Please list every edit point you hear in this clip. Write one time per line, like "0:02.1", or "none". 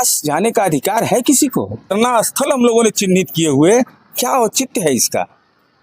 0:01.9